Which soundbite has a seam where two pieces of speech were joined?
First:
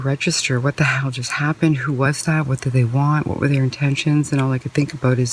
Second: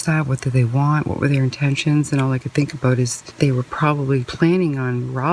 second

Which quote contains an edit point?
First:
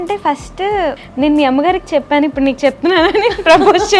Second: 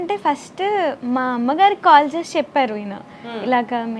first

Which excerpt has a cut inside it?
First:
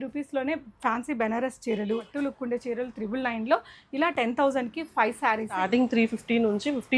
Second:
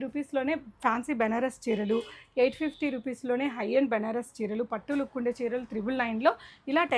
first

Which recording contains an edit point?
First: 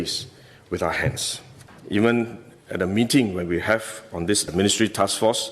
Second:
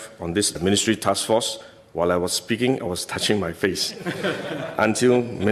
first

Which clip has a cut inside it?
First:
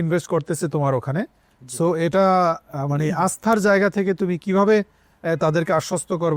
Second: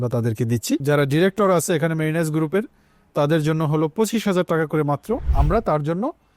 second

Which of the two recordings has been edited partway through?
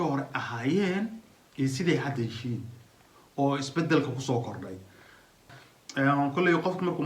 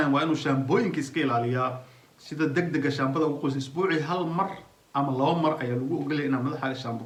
first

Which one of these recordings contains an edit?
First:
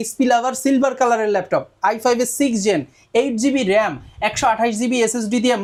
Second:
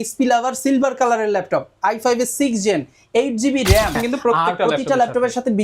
second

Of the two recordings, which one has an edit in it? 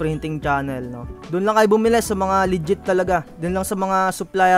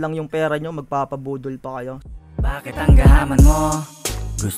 second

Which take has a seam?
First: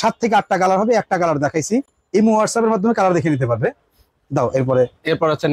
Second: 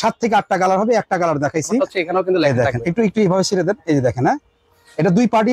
second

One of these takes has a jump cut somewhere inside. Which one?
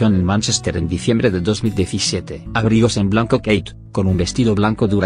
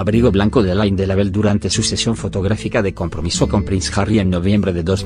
second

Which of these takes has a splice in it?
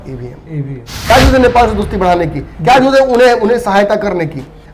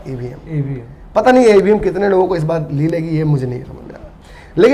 first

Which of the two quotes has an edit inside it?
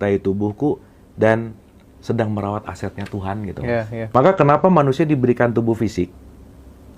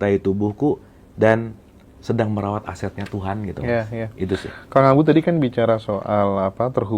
first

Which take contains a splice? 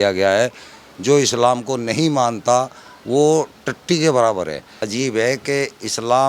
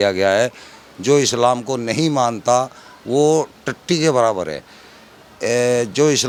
first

